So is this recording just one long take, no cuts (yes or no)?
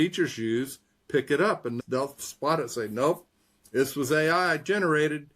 yes